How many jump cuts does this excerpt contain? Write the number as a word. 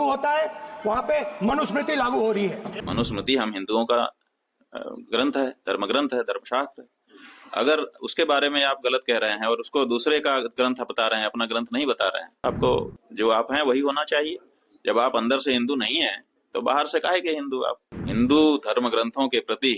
three